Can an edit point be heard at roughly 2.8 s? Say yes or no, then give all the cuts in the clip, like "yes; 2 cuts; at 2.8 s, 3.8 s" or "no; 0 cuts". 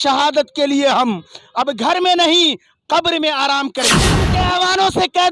no; 1 cut; at 4.2 s